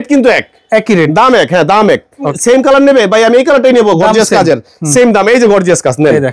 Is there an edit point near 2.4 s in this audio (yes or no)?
yes